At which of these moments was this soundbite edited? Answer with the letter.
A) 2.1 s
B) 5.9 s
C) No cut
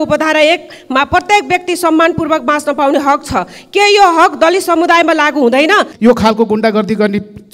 B